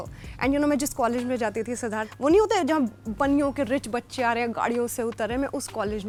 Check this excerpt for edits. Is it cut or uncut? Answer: uncut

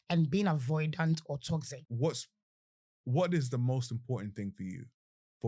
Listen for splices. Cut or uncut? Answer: cut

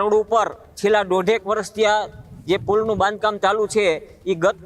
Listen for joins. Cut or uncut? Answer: uncut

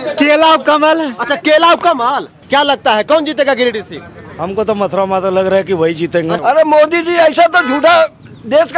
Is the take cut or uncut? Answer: cut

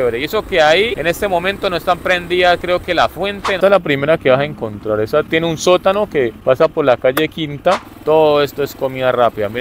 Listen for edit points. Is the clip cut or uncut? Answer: cut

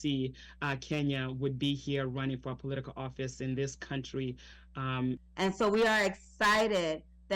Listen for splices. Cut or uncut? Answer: cut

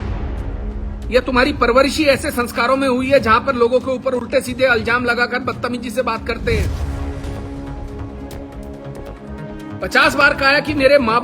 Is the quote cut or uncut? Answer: cut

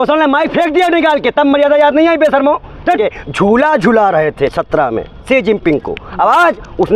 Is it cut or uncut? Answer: cut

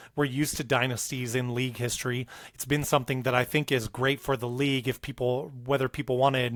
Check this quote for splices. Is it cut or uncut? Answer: uncut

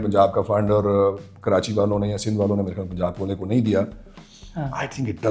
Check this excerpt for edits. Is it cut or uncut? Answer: uncut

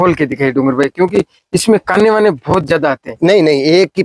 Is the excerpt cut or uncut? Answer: uncut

